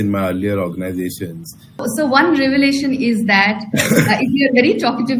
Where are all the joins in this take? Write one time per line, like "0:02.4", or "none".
0:01.8